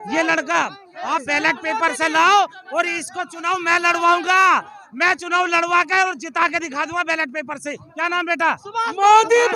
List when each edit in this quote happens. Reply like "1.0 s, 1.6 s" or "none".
none